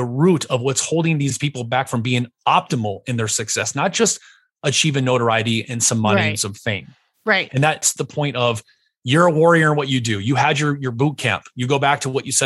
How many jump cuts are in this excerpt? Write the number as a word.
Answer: one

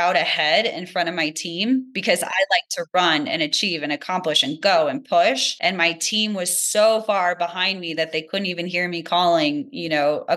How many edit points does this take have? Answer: two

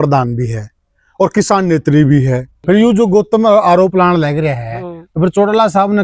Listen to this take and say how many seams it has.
one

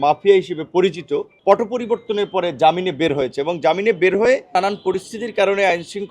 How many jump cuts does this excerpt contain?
two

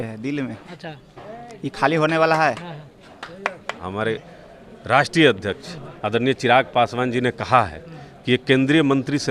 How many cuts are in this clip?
one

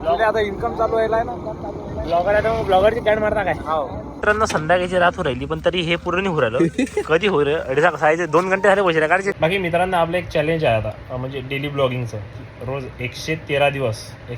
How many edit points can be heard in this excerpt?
two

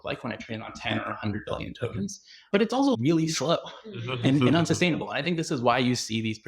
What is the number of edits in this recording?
one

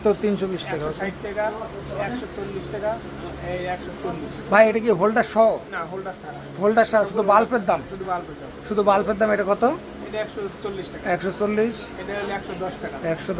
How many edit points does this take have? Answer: zero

